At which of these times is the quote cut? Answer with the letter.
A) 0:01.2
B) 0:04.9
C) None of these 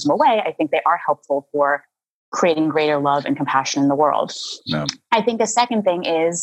C